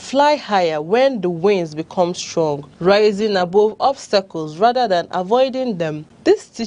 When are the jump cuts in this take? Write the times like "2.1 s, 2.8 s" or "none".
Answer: 2.2 s